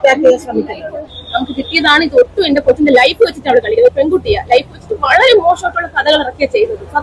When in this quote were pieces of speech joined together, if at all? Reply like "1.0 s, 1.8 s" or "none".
1.2 s